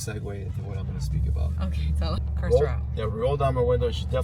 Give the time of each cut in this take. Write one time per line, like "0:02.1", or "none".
0:02.2